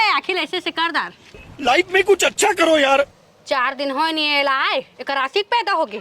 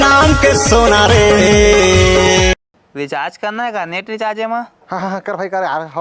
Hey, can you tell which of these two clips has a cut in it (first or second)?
second